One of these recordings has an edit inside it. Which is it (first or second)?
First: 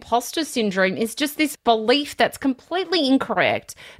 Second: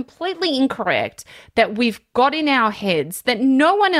first